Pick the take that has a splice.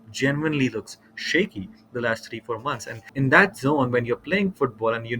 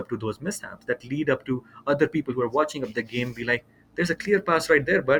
first; 1 cut; at 3.1 s

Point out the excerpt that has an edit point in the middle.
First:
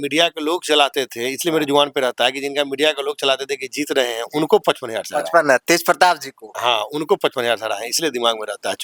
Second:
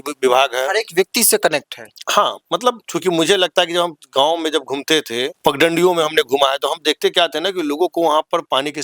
second; 2 cuts; at 2.9 s, 5.3 s

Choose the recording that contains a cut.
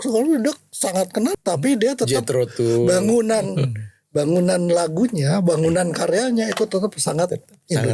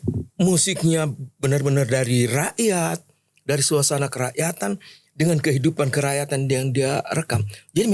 first; 1 cut; at 1.3 s

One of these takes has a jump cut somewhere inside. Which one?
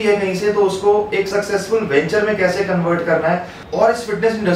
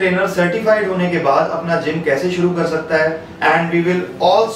second; 1 cut; at 3.3 s

